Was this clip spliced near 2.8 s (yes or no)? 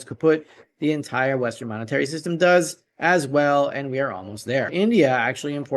no